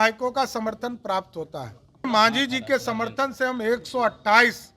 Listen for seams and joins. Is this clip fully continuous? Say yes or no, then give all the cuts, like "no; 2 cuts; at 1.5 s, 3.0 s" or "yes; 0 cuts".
no; 1 cut; at 2.1 s